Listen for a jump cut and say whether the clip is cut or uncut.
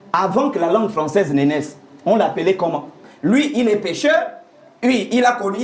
cut